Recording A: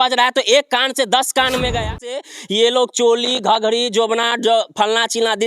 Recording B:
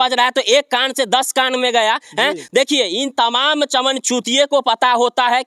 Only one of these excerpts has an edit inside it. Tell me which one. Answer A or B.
A